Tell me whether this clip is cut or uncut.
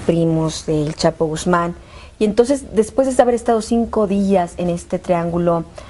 cut